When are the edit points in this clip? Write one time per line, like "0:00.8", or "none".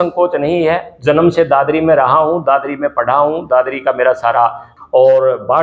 0:04.6